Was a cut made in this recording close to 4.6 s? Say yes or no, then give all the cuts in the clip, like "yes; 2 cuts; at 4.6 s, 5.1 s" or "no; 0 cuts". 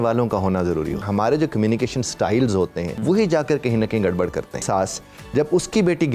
yes; 3 cuts; at 1.0 s, 3.0 s, 4.6 s